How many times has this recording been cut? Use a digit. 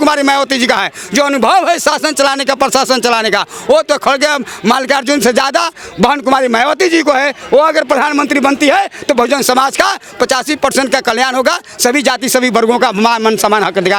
0